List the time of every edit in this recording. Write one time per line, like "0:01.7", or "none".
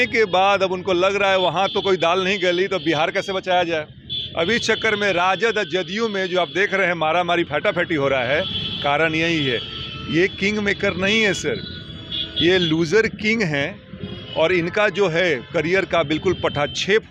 none